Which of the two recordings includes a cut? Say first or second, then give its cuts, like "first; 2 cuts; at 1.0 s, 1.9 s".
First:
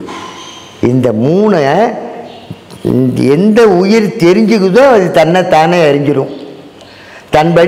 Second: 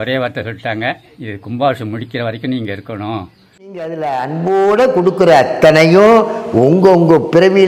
second; 1 cut; at 3.9 s